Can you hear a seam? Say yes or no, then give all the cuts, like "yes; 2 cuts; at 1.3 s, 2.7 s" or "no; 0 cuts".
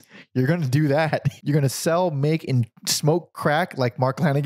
yes; 1 cut; at 1.3 s